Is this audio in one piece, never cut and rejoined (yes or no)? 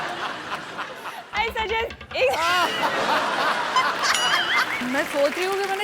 no